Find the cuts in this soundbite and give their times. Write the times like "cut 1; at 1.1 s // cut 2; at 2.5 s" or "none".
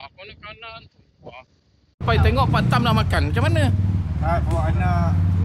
cut 1; at 2.0 s

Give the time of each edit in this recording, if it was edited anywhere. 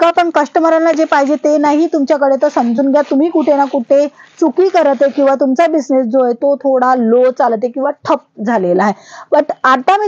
none

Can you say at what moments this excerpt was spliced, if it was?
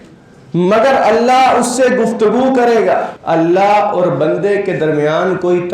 cut 1; at 3.1 s

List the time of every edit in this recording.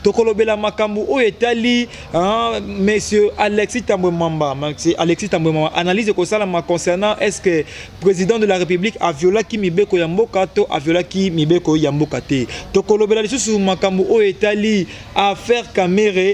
none

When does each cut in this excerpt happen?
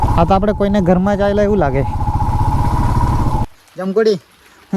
cut 1; at 3.4 s

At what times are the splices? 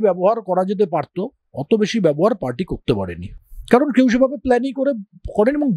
none

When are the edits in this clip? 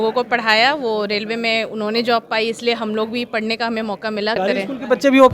cut 1; at 4.4 s

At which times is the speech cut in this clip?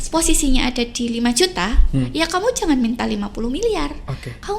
none

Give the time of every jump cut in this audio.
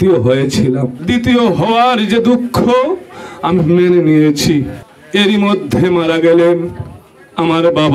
cut 1; at 0.9 s

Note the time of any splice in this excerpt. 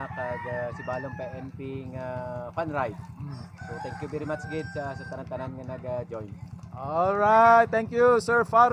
none

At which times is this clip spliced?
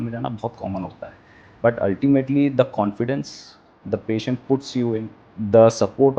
cut 1; at 5.2 s

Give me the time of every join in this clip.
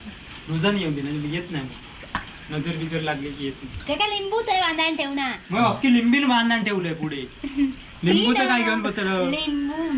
none

